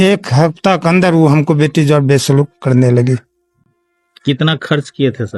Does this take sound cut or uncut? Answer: uncut